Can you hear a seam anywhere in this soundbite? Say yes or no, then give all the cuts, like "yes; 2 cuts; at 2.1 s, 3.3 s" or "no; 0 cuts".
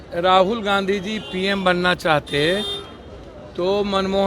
no; 0 cuts